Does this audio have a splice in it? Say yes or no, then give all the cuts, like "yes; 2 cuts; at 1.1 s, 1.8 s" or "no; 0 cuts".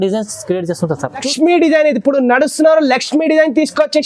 yes; 1 cut; at 1.3 s